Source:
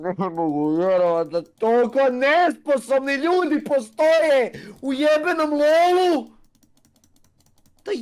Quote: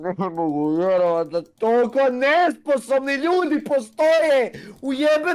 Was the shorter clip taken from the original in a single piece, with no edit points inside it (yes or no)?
yes